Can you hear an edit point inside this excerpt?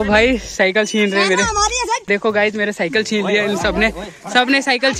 yes; 1 cut; at 2.1 s

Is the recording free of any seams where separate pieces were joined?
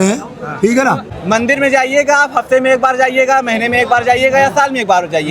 no; 1 cut; at 1.1 s

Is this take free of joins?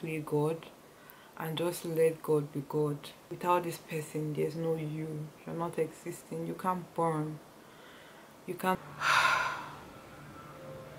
no; 2 cuts; at 3.2 s, 8.8 s

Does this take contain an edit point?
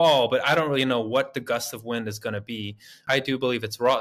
yes; 1 cut; at 3.1 s

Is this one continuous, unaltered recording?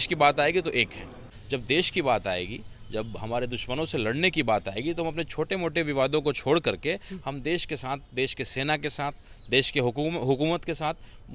no; 1 cut; at 1.3 s

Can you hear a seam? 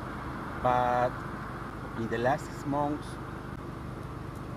yes; 2 cuts; at 1.7 s, 3.6 s

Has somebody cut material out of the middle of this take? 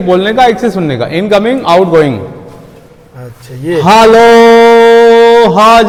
no; 0 cuts

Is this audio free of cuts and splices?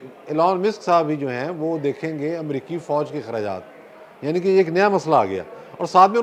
yes; 0 cuts

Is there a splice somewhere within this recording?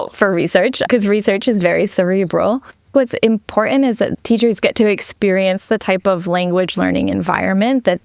yes; 2 cuts; at 2.9 s, 4.1 s

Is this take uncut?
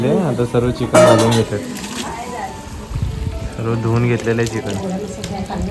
yes; 0 cuts

